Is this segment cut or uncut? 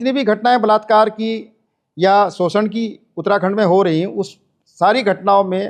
uncut